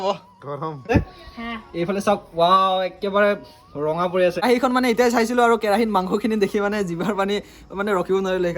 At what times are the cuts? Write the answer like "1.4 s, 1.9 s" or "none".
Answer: 0.9 s, 4.4 s